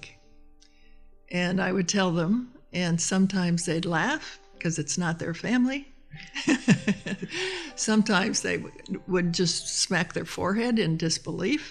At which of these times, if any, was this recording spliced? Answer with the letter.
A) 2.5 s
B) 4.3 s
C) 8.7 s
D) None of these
D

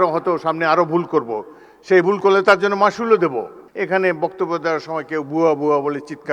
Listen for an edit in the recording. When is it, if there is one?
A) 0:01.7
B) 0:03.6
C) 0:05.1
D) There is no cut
B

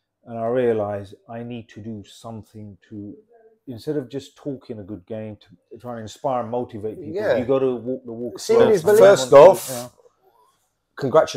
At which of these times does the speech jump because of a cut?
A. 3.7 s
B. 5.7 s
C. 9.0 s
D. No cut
C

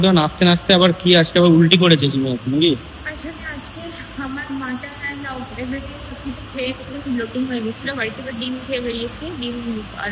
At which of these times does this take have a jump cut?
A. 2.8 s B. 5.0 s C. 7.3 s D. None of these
D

